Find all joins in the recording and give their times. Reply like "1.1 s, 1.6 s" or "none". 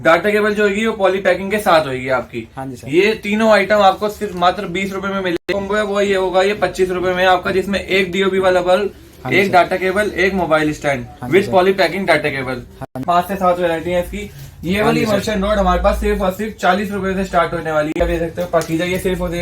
5.5 s, 13.0 s, 17.9 s